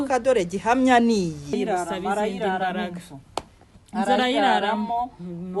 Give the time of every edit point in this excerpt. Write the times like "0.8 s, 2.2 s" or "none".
1.5 s